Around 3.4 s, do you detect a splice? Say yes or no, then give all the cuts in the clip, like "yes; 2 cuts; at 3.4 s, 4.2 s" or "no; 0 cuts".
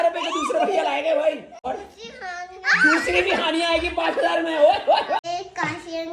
no; 2 cuts; at 1.7 s, 5.2 s